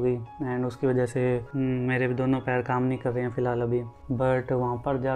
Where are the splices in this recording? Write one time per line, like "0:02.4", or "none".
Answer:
0:01.5
0:03.9